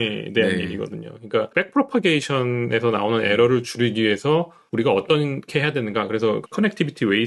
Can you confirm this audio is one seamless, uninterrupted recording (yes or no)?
no